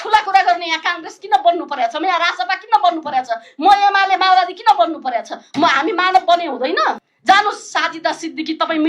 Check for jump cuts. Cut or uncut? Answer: cut